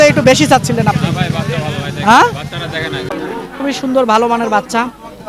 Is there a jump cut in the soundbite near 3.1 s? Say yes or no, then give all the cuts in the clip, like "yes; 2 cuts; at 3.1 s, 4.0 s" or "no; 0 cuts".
yes; 1 cut; at 3.1 s